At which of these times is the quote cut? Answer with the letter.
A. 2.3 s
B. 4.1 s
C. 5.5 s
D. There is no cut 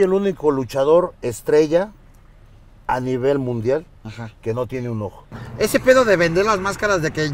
C